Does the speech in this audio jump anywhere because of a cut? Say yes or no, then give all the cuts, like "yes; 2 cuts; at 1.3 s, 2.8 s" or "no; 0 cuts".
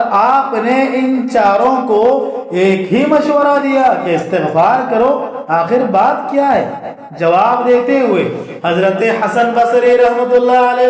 no; 0 cuts